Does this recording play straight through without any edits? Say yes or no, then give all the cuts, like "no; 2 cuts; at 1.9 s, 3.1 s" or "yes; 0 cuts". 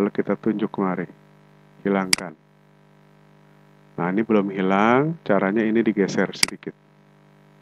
yes; 0 cuts